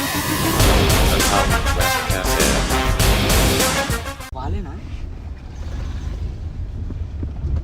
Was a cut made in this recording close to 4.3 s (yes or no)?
yes